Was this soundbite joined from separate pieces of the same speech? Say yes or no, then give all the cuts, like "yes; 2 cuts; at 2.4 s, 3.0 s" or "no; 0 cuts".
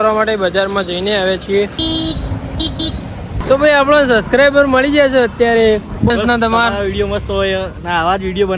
yes; 3 cuts; at 1.8 s, 3.3 s, 6.1 s